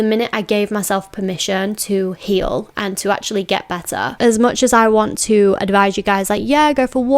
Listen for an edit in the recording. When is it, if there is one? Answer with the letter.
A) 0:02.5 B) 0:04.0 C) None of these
B